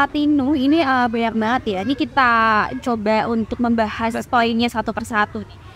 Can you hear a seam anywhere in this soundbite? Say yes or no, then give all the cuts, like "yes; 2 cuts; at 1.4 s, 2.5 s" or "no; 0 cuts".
no; 0 cuts